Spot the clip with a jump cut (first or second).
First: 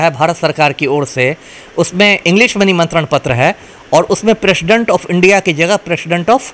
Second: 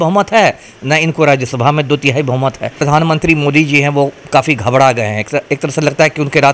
second